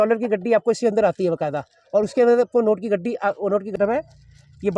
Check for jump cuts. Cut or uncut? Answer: cut